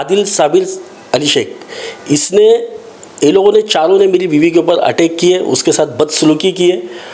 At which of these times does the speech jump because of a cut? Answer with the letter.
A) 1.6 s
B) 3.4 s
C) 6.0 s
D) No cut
D